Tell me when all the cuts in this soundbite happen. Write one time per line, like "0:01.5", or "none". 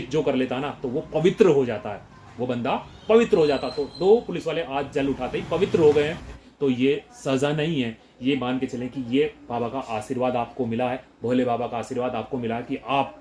0:06.3